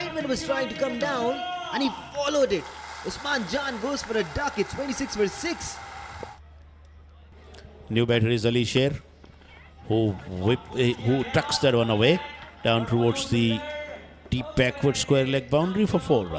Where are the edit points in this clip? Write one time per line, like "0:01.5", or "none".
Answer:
none

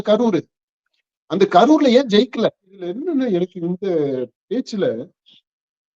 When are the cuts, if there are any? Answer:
0:02.9

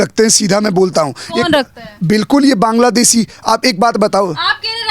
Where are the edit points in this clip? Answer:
none

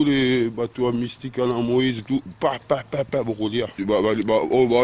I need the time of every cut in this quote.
0:03.8

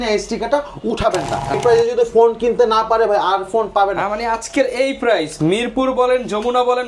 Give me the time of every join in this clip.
0:01.5

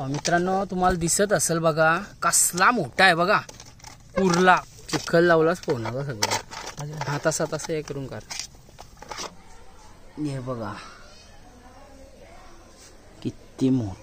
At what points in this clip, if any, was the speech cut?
0:04.7
0:09.3

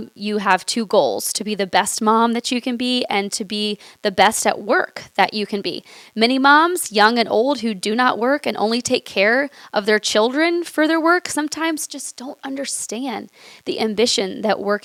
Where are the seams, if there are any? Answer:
none

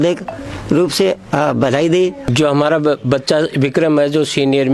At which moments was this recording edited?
0:02.3

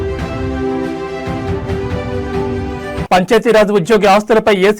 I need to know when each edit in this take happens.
none

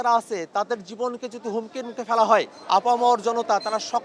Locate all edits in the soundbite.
0:02.6

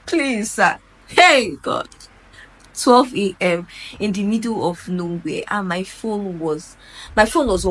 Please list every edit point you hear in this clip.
none

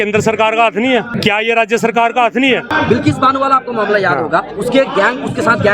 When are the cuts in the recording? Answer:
0:01.1
0:02.7

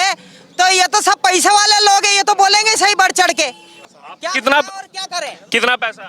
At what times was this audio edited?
0:03.7

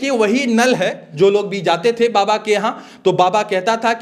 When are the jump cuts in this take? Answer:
0:01.0

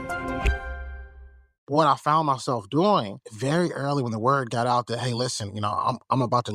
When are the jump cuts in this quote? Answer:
0:01.6

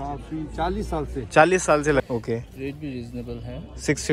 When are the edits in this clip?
0:02.0

